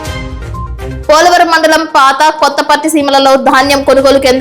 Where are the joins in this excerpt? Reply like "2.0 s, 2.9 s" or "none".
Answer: 1.0 s